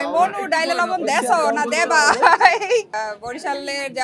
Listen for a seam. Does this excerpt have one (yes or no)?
yes